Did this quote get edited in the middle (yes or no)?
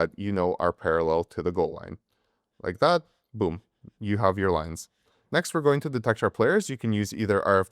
no